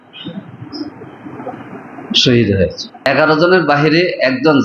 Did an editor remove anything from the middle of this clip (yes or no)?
yes